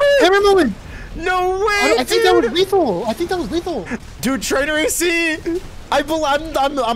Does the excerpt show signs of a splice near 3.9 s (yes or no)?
yes